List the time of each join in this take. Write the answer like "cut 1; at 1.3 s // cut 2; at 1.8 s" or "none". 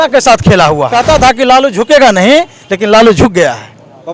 cut 1; at 1.0 s